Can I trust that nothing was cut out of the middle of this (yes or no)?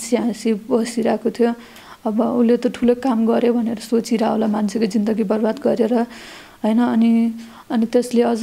yes